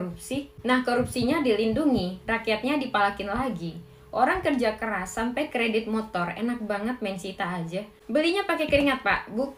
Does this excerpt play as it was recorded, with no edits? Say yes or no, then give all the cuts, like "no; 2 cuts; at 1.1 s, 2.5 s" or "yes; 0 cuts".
yes; 0 cuts